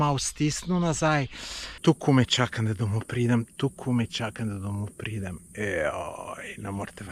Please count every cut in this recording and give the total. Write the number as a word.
one